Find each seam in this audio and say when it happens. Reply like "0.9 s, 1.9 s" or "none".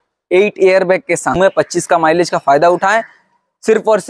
1.3 s